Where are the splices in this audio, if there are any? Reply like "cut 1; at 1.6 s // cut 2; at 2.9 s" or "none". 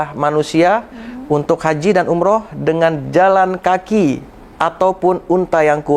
none